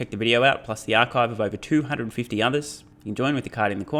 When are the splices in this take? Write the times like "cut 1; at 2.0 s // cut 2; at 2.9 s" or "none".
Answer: none

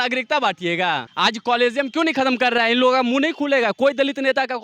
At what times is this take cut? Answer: cut 1; at 1.1 s

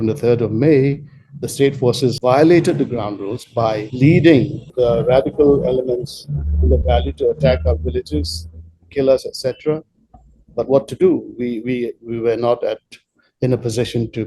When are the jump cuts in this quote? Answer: cut 1; at 2.2 s // cut 2; at 3.9 s // cut 3; at 4.7 s

